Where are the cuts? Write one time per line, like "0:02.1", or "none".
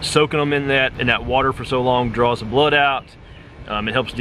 0:00.9